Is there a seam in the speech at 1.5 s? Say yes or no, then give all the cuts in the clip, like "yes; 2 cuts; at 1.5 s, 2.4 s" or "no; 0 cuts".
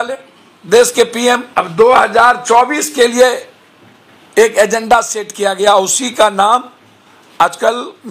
yes; 1 cut; at 1.5 s